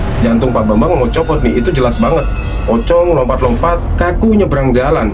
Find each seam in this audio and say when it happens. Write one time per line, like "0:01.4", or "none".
none

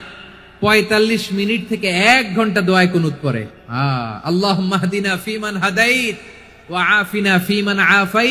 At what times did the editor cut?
0:03.5

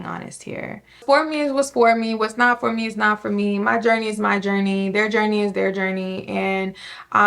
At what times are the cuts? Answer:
none

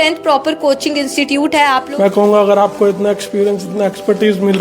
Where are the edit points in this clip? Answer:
0:01.8

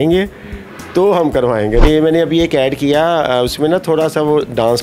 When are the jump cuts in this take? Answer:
0:01.8

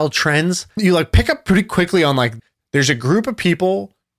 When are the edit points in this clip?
0:00.8
0:02.3

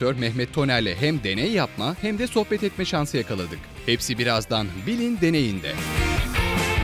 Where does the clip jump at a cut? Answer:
none

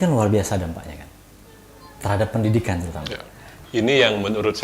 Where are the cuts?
0:03.5

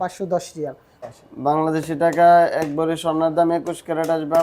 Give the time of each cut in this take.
0:01.0

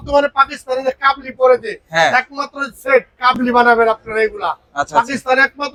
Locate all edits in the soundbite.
none

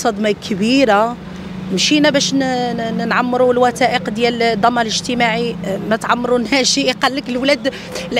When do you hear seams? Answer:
none

